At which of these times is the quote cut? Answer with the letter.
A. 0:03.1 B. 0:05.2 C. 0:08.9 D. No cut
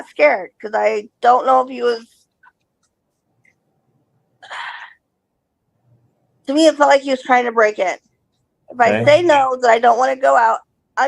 D